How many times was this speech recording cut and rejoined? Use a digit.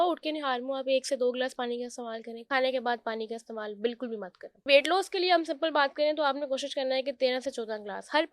2